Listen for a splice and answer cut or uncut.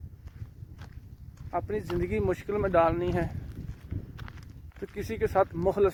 uncut